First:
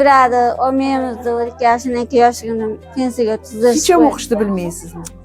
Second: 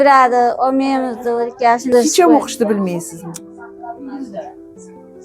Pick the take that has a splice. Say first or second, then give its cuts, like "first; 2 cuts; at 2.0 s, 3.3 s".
second; 1 cut; at 1.9 s